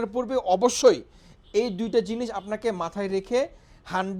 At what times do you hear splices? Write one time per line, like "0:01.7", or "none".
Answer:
none